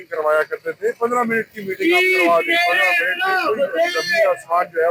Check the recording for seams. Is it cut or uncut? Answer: uncut